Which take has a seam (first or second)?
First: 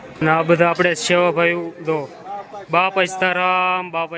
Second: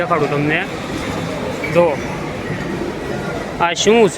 second